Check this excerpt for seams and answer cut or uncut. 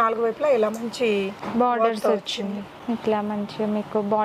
cut